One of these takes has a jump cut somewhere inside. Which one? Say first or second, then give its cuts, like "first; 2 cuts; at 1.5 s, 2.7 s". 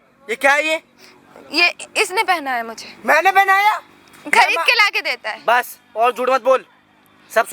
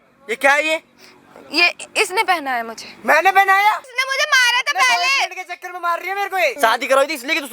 second; 2 cuts; at 4.0 s, 6.5 s